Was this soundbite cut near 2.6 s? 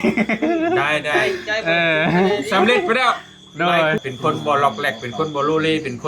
no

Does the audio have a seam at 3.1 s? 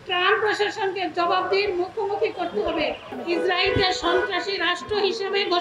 yes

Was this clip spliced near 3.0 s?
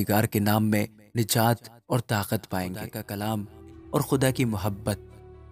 yes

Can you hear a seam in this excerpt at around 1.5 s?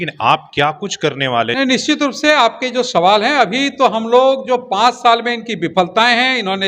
yes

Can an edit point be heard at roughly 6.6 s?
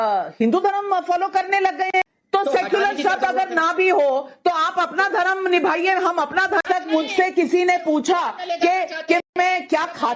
yes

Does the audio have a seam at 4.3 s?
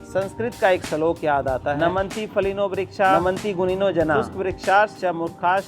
yes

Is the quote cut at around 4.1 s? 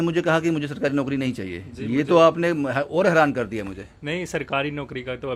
no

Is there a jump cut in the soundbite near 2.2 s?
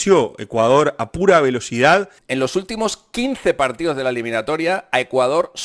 yes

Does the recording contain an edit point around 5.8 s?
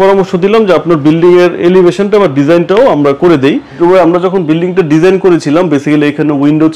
no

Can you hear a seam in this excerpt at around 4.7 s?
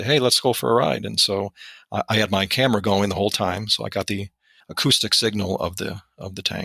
yes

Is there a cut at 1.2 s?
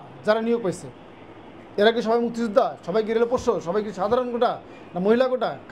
no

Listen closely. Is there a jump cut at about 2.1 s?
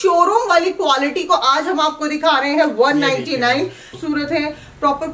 no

